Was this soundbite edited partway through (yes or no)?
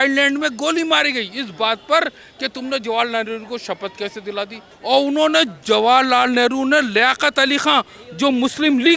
yes